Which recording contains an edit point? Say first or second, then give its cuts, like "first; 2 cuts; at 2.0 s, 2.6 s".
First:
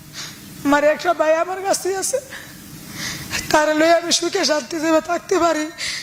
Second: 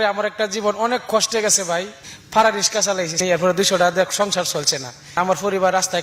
second; 3 cuts; at 2.0 s, 3.2 s, 5.1 s